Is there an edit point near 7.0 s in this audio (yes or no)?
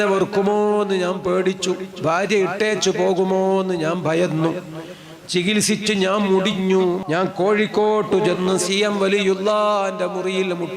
yes